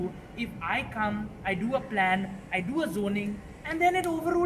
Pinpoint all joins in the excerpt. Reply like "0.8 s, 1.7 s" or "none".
none